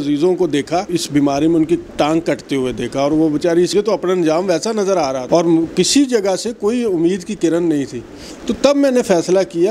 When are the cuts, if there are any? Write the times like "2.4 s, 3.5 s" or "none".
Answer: 0.9 s, 3.7 s, 5.2 s